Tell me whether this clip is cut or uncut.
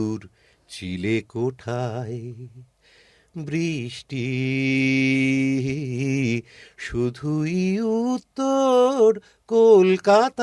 uncut